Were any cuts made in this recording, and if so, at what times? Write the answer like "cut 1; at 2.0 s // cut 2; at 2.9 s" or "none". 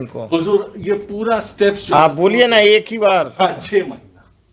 none